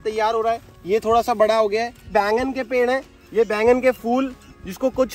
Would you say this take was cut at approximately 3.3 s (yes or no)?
no